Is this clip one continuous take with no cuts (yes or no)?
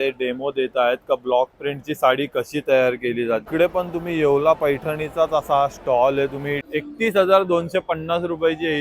no